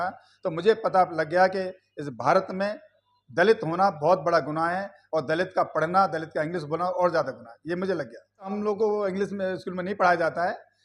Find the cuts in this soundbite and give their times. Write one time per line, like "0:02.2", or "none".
0:08.5